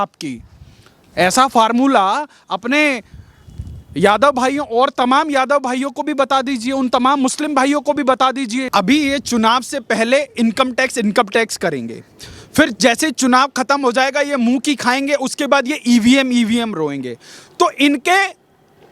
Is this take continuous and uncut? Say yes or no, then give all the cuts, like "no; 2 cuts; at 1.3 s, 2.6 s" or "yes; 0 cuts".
no; 1 cut; at 8.7 s